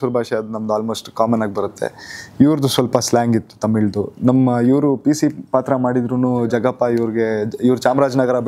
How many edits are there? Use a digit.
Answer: 0